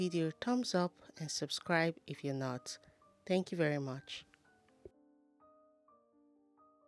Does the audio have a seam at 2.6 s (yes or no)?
no